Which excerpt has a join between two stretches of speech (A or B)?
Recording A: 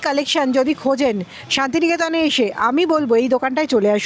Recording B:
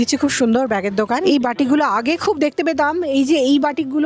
B